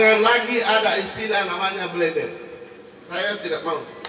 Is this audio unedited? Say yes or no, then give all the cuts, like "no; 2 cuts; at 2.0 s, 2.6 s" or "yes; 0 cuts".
yes; 0 cuts